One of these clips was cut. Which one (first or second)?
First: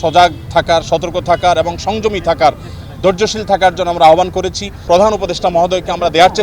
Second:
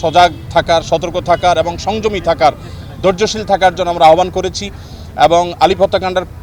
first